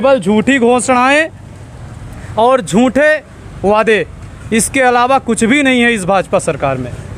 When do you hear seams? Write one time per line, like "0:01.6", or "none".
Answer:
none